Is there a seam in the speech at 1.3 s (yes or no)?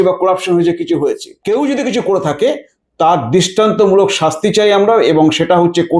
yes